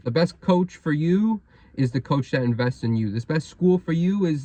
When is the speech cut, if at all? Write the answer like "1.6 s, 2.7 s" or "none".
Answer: none